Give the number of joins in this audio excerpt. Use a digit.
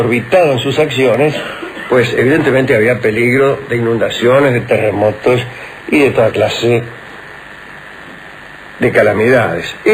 1